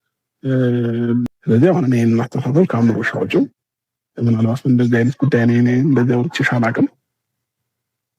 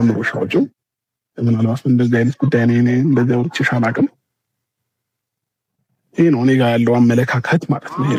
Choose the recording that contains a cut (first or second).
first